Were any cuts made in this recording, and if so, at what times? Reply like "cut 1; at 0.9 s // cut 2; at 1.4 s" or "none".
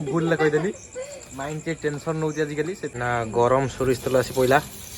cut 1; at 2.9 s